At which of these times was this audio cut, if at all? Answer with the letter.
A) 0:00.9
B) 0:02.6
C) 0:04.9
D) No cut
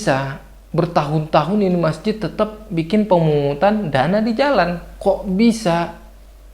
C